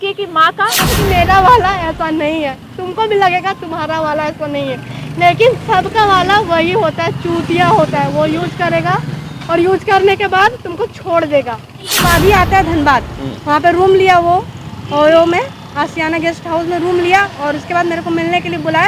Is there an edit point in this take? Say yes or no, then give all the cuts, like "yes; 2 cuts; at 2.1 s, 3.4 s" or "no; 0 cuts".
yes; 2 cuts; at 0.9 s, 12.0 s